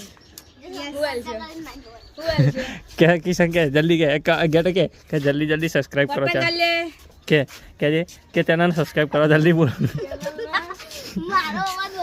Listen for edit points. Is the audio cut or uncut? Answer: uncut